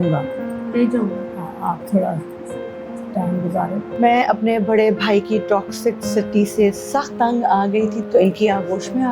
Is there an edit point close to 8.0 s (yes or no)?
yes